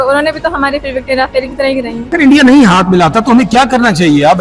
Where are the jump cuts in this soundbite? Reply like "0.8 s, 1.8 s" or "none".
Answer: 2.1 s